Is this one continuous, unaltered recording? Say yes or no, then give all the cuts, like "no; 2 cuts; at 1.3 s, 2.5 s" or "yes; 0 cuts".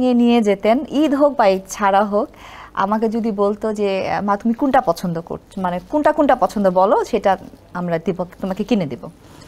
yes; 0 cuts